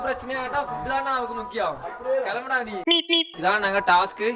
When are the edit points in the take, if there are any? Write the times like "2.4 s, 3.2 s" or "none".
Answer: 3.0 s